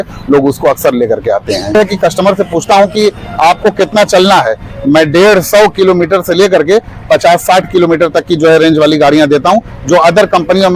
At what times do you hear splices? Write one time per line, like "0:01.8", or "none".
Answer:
0:01.8